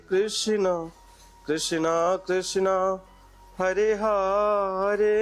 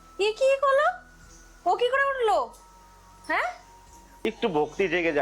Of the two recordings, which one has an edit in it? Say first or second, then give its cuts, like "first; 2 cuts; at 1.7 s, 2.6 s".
second; 1 cut; at 4.0 s